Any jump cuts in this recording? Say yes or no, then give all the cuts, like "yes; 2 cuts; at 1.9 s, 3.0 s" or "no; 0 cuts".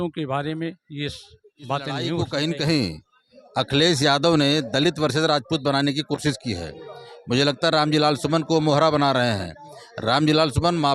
yes; 1 cut; at 2.2 s